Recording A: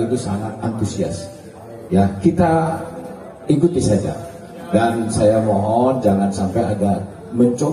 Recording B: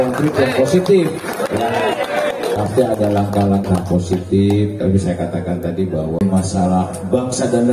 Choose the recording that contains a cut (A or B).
B